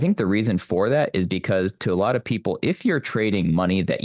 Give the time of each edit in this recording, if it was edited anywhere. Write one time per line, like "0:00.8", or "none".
none